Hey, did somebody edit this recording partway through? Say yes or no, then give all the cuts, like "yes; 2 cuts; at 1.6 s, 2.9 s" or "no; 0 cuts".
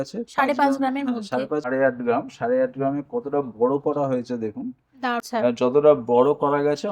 yes; 2 cuts; at 1.7 s, 5.2 s